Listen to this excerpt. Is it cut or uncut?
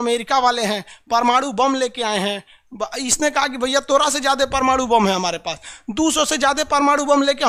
uncut